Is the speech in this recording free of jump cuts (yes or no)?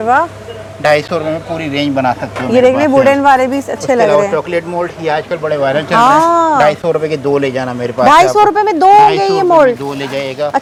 yes